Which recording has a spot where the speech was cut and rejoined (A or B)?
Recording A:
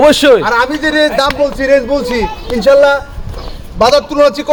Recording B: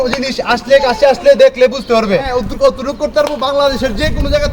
B